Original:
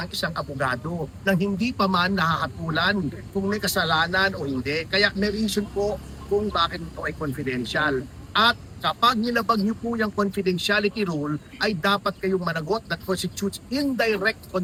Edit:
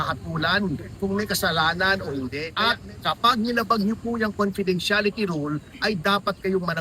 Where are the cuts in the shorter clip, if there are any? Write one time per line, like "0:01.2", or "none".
0:02.5

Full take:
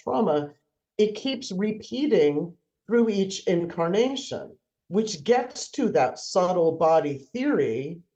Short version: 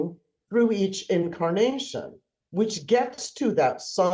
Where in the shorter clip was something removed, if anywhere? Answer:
none

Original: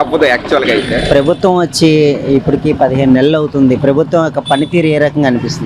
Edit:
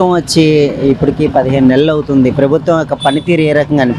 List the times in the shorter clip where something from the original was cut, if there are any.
none

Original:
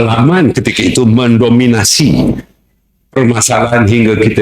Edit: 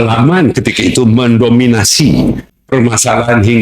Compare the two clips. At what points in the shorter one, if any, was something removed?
0:02.5

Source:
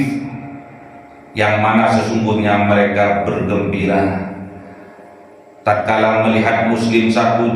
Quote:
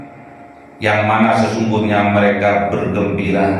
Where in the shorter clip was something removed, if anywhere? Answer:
none

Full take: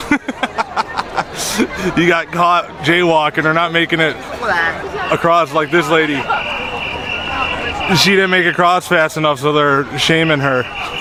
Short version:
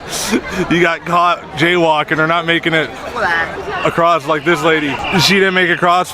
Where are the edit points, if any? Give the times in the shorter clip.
0:05.0

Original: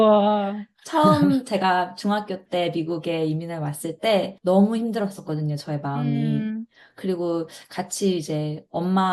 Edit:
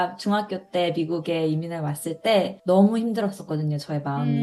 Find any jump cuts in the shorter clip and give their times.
none

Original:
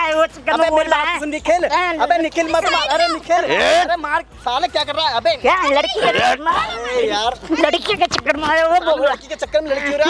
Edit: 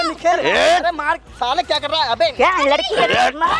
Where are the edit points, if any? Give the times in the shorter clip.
none

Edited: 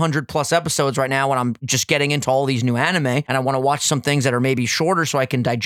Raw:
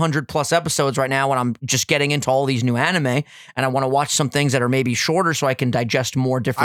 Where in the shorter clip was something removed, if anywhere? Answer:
0:03.3

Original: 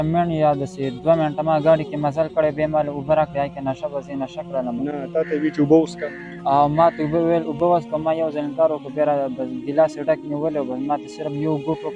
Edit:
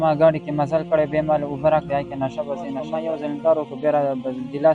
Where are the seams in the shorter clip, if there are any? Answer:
0:02.9

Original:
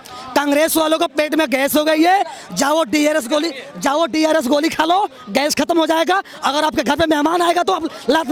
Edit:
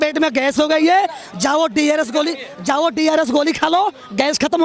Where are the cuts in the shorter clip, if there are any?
none

